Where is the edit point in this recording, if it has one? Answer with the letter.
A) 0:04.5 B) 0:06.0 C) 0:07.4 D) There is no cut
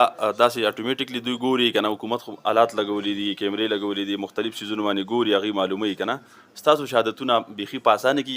D